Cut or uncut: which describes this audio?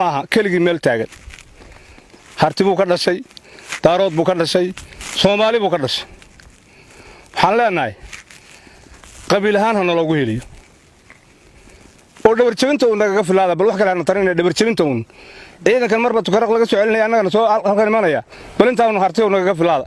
uncut